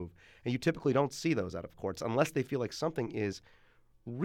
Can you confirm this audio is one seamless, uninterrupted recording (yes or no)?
no